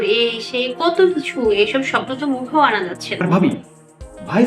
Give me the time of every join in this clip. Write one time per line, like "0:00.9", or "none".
0:03.2